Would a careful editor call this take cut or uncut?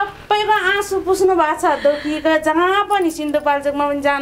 uncut